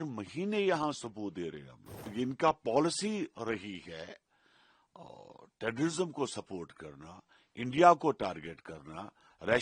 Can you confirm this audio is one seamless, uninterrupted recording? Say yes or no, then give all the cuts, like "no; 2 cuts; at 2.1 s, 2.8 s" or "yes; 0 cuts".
no; 1 cut; at 2.0 s